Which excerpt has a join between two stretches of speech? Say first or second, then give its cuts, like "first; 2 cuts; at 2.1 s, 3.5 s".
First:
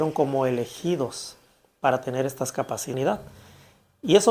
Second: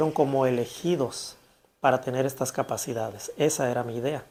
first; 1 cut; at 2.9 s